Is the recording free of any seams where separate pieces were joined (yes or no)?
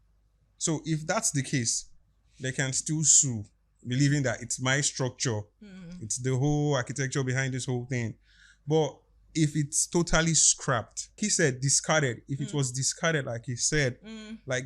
no